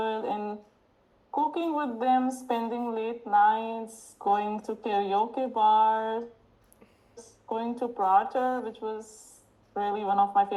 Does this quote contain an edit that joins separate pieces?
no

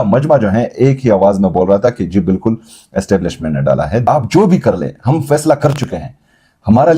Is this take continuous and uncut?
no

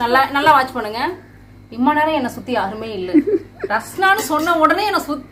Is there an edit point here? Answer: no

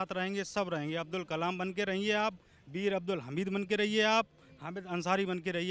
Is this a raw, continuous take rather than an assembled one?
yes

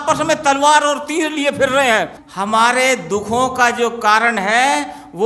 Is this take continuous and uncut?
no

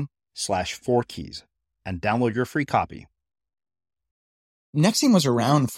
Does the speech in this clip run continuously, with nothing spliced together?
no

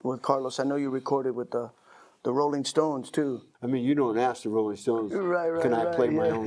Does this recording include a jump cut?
yes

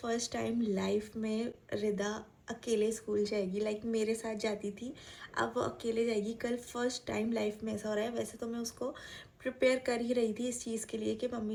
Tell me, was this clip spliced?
no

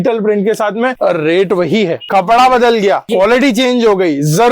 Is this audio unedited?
no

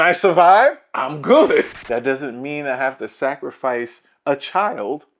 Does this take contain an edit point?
yes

